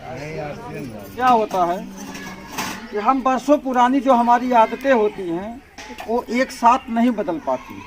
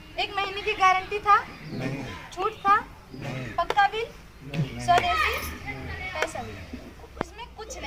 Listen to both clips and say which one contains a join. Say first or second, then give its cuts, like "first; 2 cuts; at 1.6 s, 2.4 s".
first; 1 cut; at 1.1 s